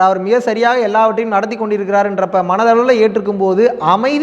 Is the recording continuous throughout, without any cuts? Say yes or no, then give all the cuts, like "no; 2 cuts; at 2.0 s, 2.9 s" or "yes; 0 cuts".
yes; 0 cuts